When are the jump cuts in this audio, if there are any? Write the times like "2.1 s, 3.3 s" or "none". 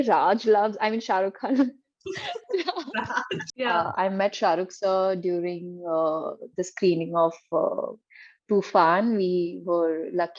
3.5 s